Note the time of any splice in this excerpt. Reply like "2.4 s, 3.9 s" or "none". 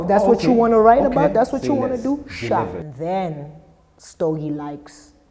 2.8 s